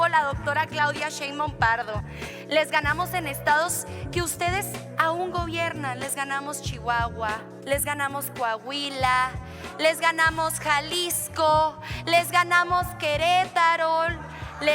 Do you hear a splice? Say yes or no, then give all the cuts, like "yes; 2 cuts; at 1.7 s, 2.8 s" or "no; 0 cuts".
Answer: yes; 1 cut; at 7.5 s